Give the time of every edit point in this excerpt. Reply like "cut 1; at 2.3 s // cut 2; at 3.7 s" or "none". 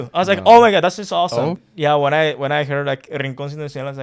cut 1; at 1.6 s